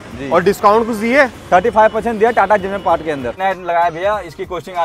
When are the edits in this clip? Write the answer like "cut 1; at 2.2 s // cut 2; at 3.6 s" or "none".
cut 1; at 3.4 s